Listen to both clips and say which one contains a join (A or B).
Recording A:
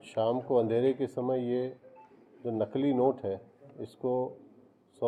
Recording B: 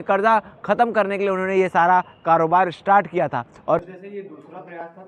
B